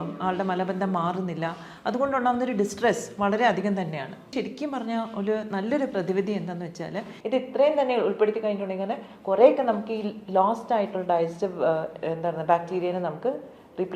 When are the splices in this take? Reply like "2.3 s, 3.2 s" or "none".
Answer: 4.3 s, 7.1 s